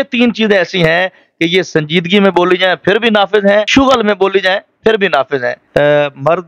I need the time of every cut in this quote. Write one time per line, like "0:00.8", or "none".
0:03.7
0:05.6